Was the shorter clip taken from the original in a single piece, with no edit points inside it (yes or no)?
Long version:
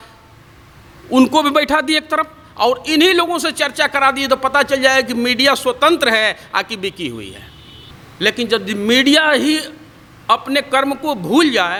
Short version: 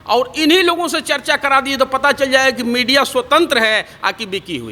yes